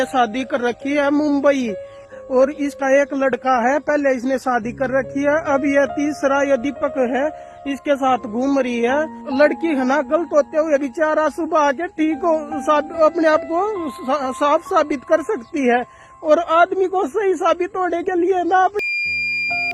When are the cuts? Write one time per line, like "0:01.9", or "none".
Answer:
0:02.2
0:09.2